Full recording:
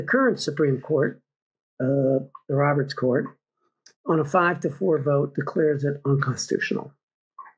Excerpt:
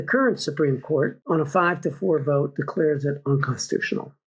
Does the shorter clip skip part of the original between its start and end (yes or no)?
yes